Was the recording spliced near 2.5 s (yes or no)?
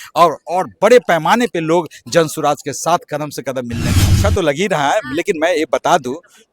no